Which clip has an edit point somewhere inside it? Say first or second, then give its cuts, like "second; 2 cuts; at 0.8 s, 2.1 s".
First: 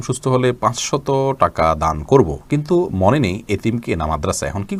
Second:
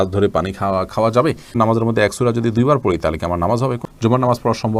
second; 2 cuts; at 1.5 s, 3.8 s